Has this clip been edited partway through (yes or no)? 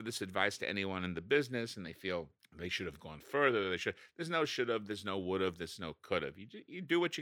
no